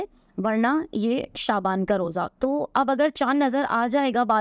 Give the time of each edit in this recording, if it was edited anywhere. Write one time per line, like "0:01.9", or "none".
none